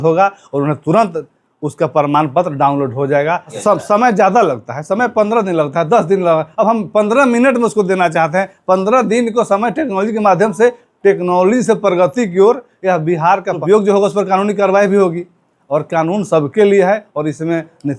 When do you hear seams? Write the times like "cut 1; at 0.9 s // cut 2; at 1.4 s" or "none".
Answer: cut 1; at 3.6 s // cut 2; at 13.6 s